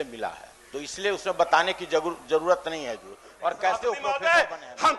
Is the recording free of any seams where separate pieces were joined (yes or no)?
yes